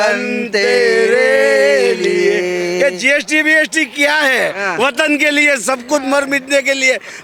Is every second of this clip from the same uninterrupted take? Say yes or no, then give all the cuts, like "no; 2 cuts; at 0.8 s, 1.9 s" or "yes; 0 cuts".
yes; 0 cuts